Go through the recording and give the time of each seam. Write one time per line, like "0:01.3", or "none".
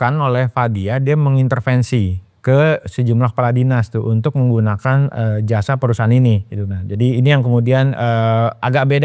none

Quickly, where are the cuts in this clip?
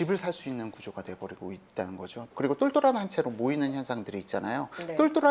0:02.3

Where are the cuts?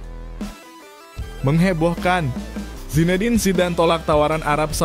0:01.4

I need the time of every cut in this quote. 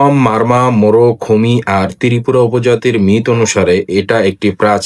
none

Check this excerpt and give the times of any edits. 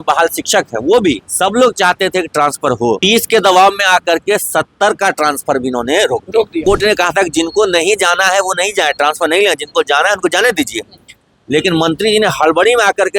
0:01.3
0:03.0
0:06.6

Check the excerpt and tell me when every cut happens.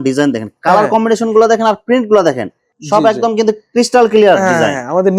none

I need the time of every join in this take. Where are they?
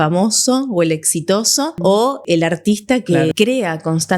0:02.2
0:03.3

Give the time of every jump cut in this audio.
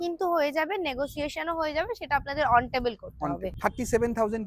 0:03.5

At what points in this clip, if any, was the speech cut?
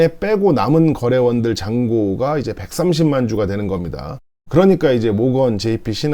0:04.1

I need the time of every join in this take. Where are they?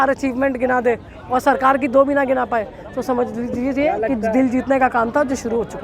none

